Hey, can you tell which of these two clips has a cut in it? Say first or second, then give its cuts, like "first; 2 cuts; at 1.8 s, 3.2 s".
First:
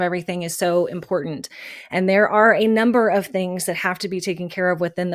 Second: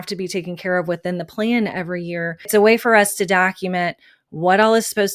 second; 1 cut; at 2.5 s